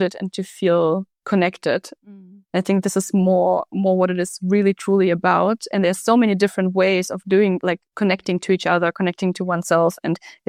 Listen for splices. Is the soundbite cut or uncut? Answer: uncut